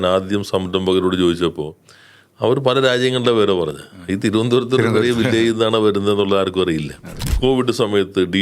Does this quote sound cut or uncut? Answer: cut